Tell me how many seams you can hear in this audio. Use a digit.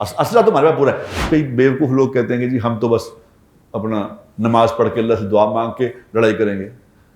1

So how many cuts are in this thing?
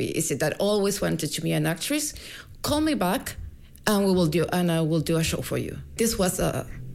1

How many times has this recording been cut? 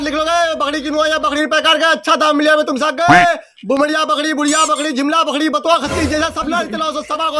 0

